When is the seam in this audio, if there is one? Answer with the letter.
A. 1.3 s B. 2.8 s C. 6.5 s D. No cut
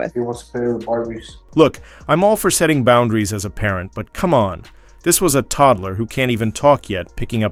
D